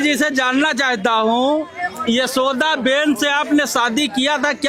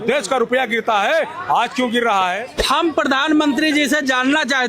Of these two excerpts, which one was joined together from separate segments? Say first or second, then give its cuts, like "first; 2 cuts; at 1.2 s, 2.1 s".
second; 1 cut; at 2.5 s